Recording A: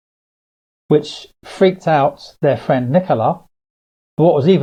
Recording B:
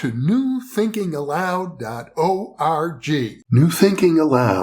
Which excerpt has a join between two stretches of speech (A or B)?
B